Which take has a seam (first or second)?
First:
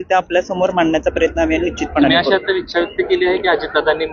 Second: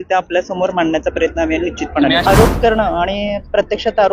second